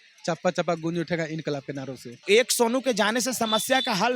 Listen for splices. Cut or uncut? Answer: cut